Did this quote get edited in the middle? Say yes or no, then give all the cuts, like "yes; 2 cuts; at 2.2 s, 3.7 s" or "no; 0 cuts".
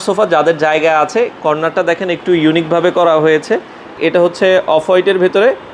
yes; 1 cut; at 4.0 s